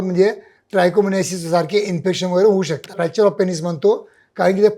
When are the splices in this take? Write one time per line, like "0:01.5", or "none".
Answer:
0:03.0